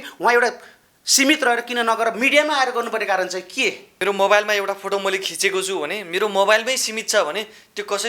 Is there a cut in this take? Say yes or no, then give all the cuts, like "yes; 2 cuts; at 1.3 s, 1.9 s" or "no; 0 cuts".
yes; 1 cut; at 3.9 s